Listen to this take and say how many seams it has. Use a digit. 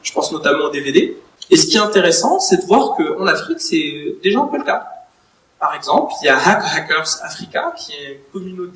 1